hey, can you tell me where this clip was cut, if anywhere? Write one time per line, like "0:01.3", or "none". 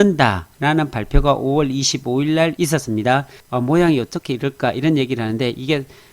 0:03.4